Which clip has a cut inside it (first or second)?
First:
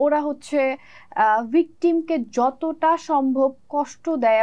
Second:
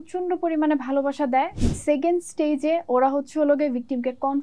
second